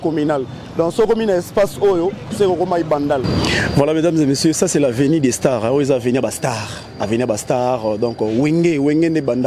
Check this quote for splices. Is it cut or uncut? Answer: cut